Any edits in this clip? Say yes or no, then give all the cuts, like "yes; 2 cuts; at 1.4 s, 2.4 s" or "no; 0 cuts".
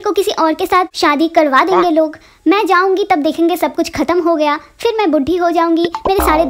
yes; 1 cut; at 0.9 s